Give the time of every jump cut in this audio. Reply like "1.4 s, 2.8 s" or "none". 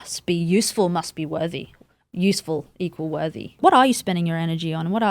3.6 s